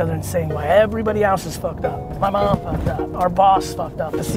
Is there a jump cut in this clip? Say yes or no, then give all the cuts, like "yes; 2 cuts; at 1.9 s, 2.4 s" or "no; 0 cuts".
yes; 2 cuts; at 2.1 s, 3.1 s